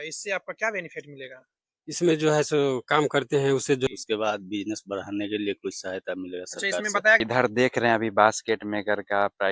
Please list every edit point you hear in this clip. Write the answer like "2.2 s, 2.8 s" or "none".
3.9 s, 7.2 s